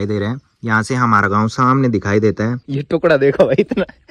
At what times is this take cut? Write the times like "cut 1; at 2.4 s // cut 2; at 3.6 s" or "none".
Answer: cut 1; at 2.6 s